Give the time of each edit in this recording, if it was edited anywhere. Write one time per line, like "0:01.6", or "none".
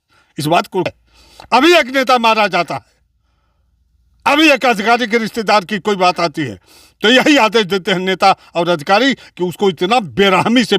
0:01.0